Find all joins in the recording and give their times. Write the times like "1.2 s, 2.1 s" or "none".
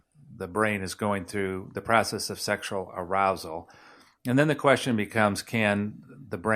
none